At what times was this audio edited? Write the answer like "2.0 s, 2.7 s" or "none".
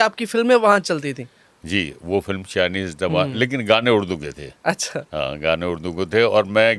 none

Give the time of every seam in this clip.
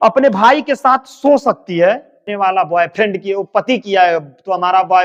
2.3 s

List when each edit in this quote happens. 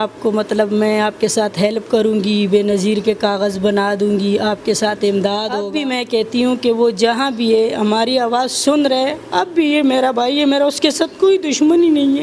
5.6 s

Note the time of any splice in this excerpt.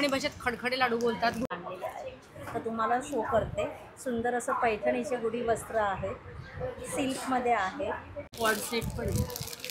1.4 s, 8.3 s

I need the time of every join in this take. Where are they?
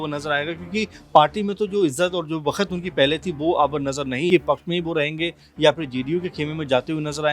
4.3 s

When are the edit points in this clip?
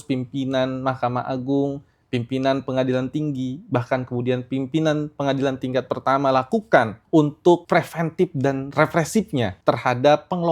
7.0 s, 7.6 s, 9.5 s

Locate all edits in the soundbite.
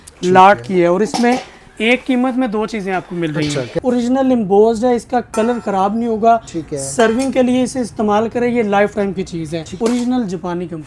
3.8 s, 9.7 s

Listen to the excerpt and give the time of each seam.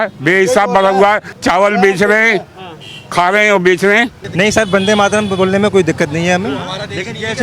1.3 s, 4.2 s

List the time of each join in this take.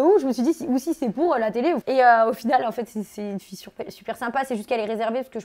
1.8 s

